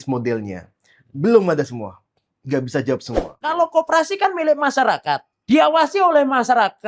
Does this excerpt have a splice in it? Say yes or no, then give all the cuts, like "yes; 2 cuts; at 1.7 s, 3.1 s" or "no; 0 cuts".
yes; 2 cuts; at 3.4 s, 5.3 s